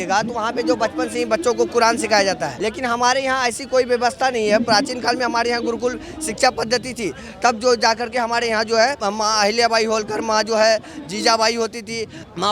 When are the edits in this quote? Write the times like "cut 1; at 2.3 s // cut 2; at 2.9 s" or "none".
cut 1; at 2.5 s // cut 2; at 9.0 s